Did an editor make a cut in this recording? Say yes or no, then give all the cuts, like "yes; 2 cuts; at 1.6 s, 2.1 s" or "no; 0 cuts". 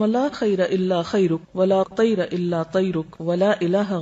yes; 1 cut; at 3.1 s